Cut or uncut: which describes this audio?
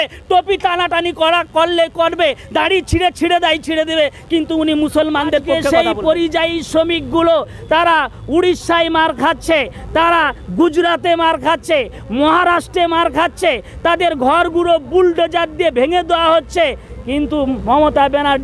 cut